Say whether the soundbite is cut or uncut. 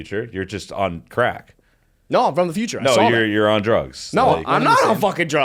uncut